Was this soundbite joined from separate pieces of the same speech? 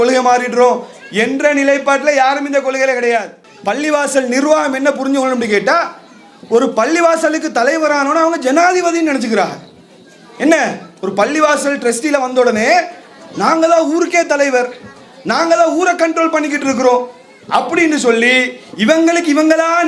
yes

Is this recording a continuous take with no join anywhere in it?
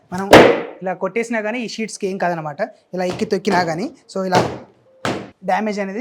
yes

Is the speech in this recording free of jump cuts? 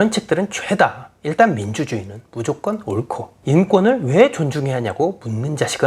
yes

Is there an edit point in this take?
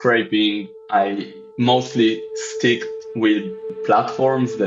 yes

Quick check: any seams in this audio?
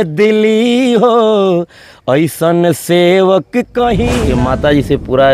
yes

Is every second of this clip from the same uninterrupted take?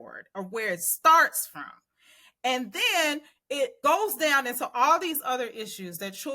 no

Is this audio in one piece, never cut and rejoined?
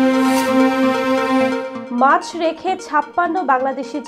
no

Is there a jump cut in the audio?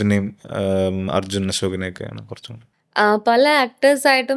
no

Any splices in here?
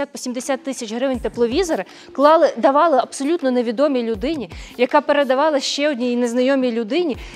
no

